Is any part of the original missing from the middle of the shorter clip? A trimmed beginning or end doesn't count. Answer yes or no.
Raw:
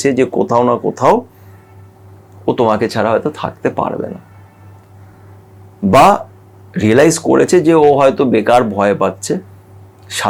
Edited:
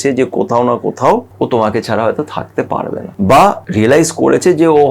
yes